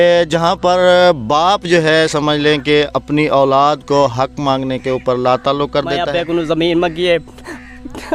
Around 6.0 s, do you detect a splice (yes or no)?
yes